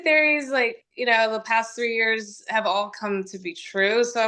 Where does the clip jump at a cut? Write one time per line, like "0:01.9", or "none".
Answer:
none

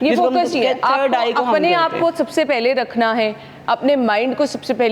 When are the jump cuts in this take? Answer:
none

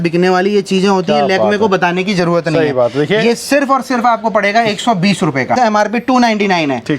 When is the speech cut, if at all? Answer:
0:05.6

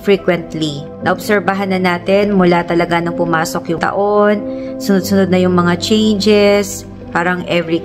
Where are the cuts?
none

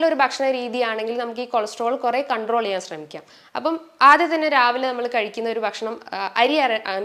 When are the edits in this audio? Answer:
none

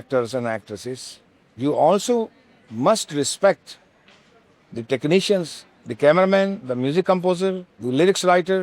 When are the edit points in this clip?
0:07.7

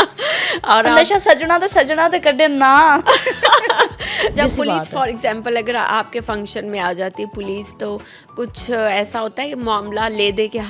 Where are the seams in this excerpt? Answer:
0:04.3

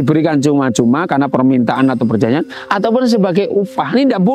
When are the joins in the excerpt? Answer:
none

